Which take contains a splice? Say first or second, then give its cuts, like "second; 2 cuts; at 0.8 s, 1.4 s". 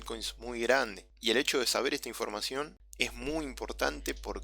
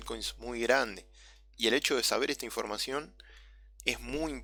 first; 2 cuts; at 1.1 s, 2.8 s